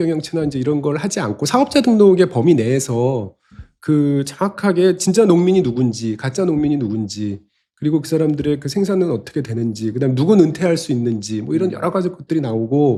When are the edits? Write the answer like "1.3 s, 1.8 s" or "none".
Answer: none